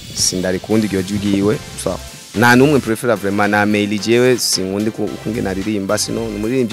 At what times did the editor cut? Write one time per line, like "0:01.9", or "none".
0:01.8